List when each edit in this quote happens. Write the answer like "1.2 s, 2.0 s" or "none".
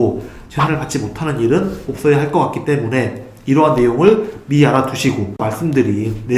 5.4 s